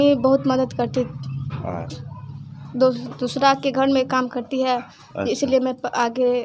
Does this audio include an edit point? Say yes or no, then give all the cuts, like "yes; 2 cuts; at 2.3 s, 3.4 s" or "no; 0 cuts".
no; 0 cuts